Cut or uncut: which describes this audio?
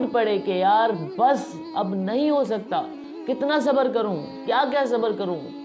uncut